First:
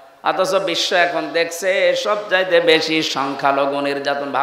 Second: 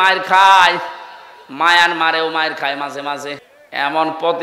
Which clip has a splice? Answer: second; 1 cut; at 3.5 s

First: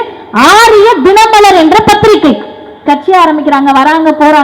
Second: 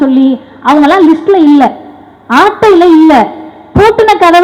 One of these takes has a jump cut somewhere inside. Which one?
first; 1 cut; at 2.8 s

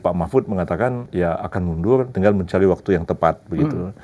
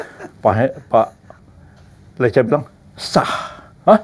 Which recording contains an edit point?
first; 2 cuts; at 1.0 s, 2.1 s

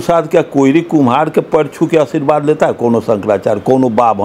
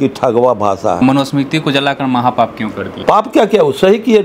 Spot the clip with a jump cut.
second; 2 cuts; at 1.0 s, 2.9 s

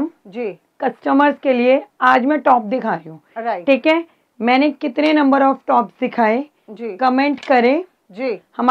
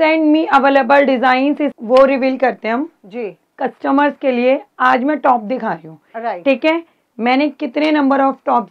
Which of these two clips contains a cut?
second; 1 cut; at 1.6 s

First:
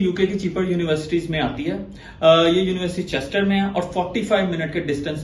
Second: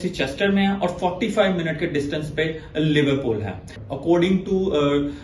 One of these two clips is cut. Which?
second; 1 cut; at 3.8 s

